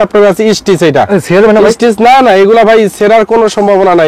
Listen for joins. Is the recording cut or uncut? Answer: uncut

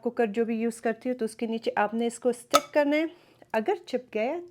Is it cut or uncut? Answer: uncut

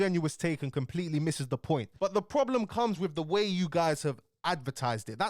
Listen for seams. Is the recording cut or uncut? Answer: cut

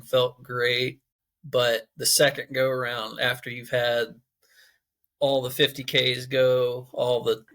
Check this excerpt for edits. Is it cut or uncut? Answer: cut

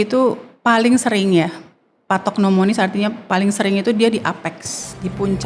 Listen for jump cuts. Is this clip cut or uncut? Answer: uncut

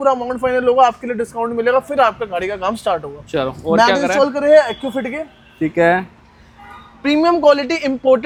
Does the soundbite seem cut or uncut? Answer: uncut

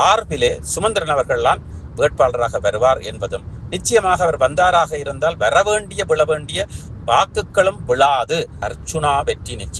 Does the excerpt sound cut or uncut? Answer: cut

